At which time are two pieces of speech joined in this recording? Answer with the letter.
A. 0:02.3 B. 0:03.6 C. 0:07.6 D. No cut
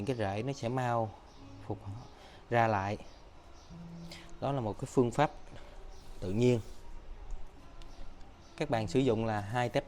C